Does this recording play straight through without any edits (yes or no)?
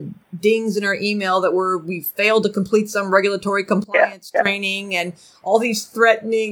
yes